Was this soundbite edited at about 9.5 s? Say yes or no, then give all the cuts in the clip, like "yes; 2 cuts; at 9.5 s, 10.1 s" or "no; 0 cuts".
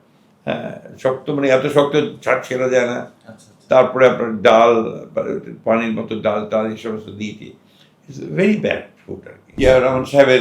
yes; 1 cut; at 9.5 s